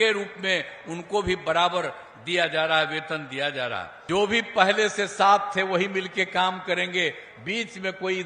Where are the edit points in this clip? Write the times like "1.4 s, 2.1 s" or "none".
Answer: 3.9 s